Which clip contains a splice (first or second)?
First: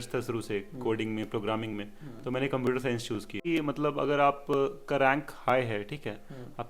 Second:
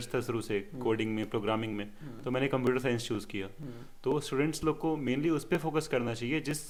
first